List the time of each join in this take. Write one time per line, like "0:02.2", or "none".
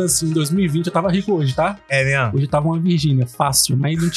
none